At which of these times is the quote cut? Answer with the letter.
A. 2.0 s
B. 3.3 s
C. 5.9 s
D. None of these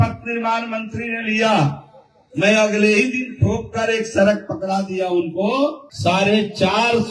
C